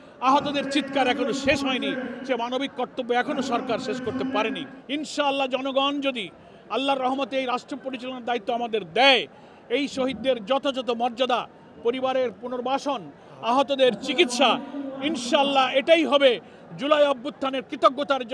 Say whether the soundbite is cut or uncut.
uncut